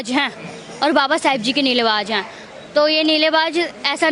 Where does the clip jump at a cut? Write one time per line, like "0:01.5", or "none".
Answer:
none